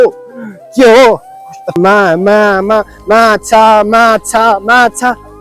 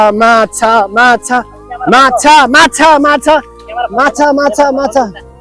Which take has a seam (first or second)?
first